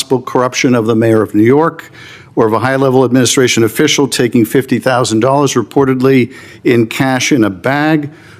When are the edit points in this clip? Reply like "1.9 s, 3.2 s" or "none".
none